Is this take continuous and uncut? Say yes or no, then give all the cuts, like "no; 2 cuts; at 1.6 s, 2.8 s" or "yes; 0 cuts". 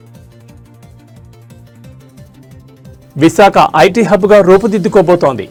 yes; 0 cuts